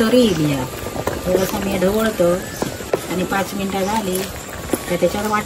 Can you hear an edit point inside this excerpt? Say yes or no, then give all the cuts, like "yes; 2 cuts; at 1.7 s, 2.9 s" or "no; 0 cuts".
no; 0 cuts